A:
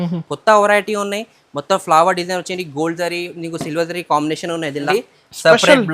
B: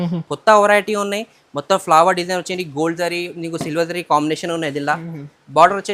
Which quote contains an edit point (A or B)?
A